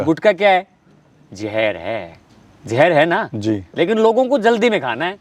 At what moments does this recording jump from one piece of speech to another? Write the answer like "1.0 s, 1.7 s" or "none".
none